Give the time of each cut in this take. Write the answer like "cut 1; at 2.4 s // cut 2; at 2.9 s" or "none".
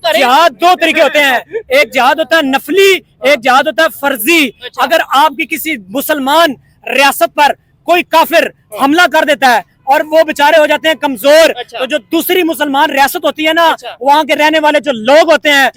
none